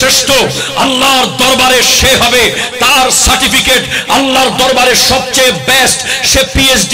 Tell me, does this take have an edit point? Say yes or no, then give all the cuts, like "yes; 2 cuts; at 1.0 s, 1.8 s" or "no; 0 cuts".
no; 0 cuts